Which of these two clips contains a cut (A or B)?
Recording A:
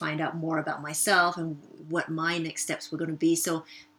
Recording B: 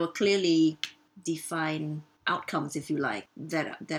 B